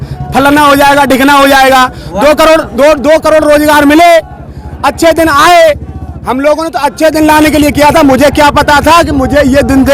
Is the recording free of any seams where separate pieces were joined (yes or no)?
yes